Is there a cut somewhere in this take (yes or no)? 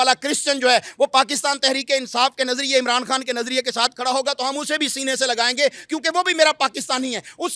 no